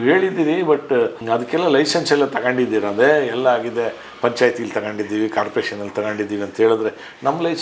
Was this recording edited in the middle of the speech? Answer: no; 0 cuts

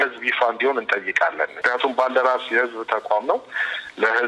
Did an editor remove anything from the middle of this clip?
yes; 1 cut; at 1.6 s

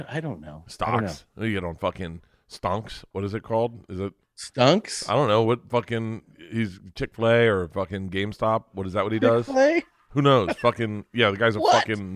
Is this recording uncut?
yes; 0 cuts

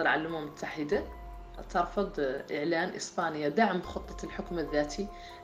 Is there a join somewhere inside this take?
yes; 1 cut; at 1.6 s

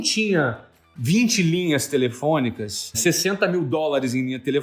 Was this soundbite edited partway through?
yes; 1 cut; at 3.0 s

